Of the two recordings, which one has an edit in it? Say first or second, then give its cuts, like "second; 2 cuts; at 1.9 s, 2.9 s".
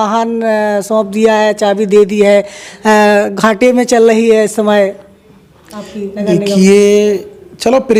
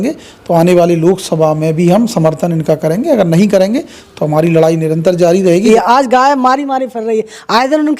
second; 1 cut; at 5.7 s